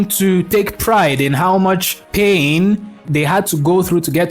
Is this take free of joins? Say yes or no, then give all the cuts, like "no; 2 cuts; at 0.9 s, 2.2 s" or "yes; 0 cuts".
no; 1 cut; at 3.0 s